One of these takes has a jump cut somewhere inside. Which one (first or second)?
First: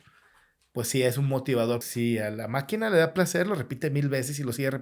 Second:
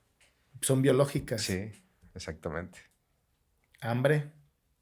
first